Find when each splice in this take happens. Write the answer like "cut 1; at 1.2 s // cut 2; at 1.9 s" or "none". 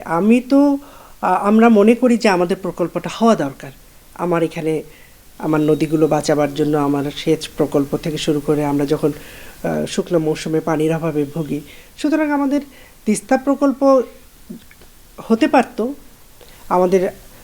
none

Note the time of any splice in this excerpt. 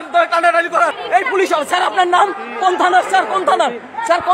cut 1; at 1.0 s

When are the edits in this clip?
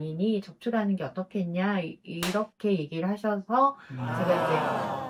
none

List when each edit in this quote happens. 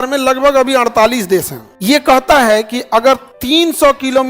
cut 1; at 1.7 s // cut 2; at 3.3 s

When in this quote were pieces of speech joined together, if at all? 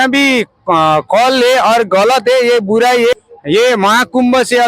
cut 1; at 3.1 s

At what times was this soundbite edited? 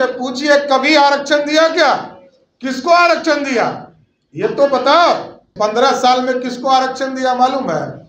cut 1; at 5.5 s

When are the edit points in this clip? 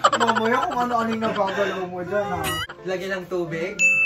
cut 1; at 2.7 s

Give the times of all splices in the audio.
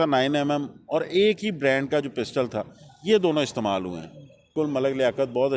cut 1; at 4.4 s

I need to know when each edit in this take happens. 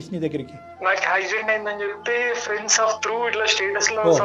none

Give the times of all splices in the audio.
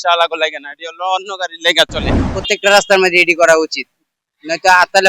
cut 1; at 2.1 s

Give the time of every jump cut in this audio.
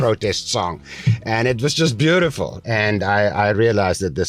cut 1; at 2.5 s

